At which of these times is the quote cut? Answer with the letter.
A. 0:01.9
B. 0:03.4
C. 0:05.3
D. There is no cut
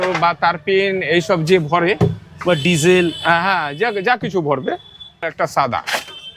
C